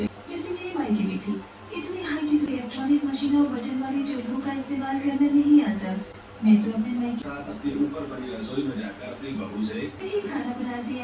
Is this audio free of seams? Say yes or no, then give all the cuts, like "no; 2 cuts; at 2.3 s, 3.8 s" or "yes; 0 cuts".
no; 1 cut; at 3.3 s